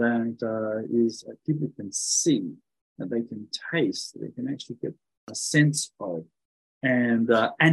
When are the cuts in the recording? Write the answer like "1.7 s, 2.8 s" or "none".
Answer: 5.2 s